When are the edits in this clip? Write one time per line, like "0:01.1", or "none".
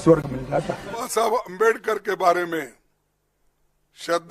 0:01.1